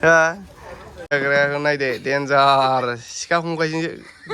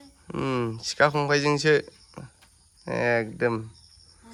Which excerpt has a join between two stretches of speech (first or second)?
first